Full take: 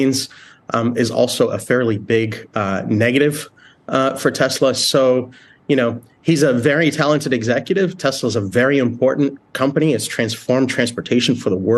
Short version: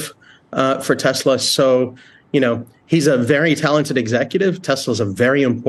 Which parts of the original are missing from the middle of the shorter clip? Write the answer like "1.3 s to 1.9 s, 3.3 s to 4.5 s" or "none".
none

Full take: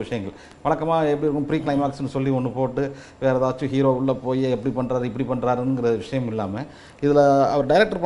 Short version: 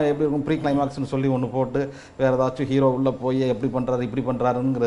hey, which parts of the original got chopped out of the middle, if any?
none

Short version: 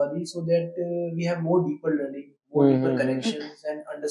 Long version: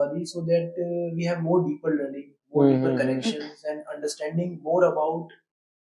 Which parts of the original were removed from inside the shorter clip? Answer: none

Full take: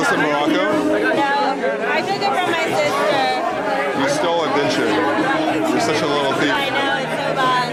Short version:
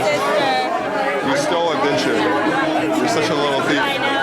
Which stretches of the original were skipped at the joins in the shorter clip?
none

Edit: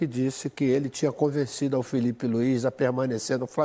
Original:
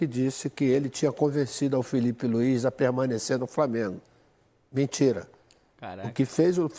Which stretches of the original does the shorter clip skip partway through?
none

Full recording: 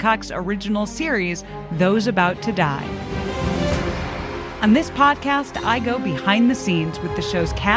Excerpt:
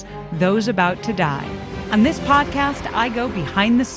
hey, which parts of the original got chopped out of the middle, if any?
3.1 s to 4.4 s

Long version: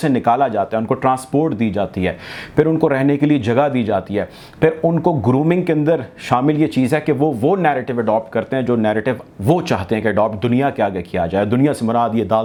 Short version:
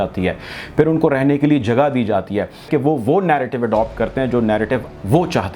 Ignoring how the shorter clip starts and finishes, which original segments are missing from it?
4.5 s to 7.0 s

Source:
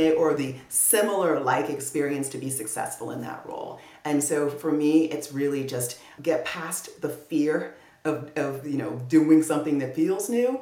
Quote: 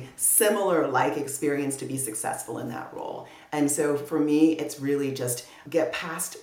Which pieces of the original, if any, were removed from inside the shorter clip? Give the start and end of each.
none

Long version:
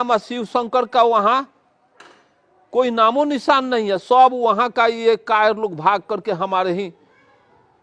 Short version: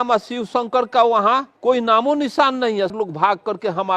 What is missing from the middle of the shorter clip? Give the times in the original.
1.5 s to 2.6 s, 4.0 s to 5.6 s

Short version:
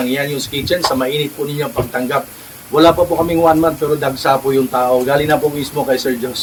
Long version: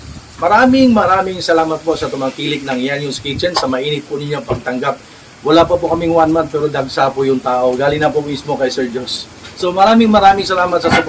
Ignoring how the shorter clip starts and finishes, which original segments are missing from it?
none

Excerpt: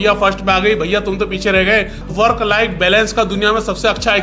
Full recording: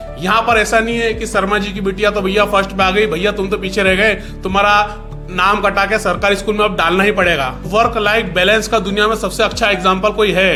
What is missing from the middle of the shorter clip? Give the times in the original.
4.3 s to 7.6 s

